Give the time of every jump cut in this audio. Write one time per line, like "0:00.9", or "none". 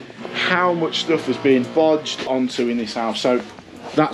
0:02.3